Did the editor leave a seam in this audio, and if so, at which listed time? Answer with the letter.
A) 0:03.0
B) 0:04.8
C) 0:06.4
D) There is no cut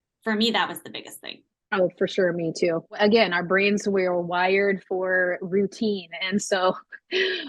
A